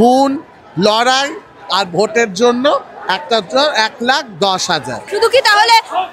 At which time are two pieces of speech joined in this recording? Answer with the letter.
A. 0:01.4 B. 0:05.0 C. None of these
B